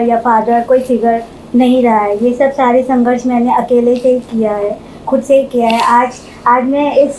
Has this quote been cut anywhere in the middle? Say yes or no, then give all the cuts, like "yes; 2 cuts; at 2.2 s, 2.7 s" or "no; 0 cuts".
no; 0 cuts